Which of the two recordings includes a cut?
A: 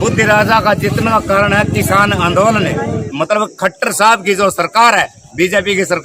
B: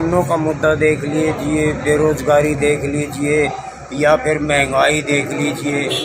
A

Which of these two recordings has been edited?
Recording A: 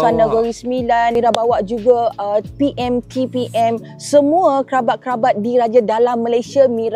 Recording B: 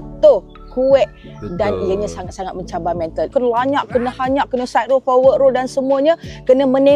B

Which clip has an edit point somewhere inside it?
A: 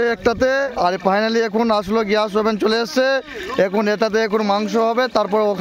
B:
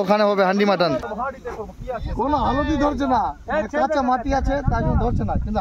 B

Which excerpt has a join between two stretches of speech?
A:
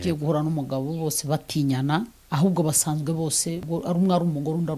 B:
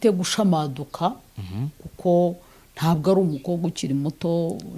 A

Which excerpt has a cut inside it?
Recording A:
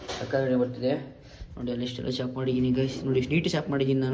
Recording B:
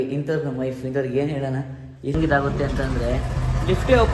B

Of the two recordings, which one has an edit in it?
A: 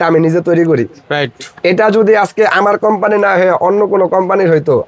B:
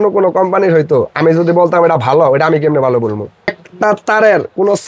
B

